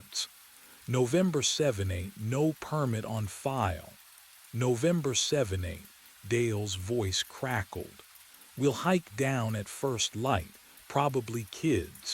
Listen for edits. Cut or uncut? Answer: cut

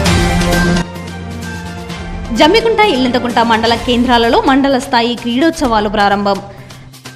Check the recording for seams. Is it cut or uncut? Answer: cut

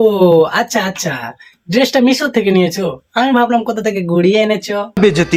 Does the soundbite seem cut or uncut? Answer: uncut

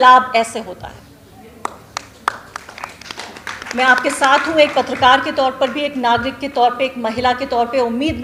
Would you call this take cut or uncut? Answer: uncut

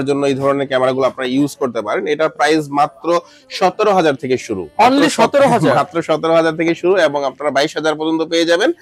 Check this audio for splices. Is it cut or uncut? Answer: uncut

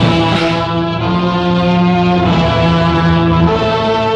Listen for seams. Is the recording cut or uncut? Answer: uncut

